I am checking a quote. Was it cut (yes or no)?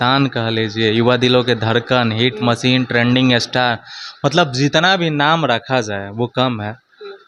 no